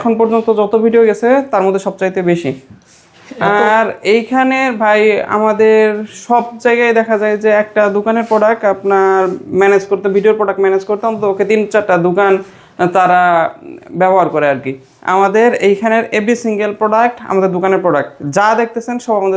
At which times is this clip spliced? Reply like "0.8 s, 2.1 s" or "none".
none